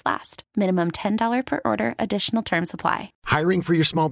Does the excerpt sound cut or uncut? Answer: cut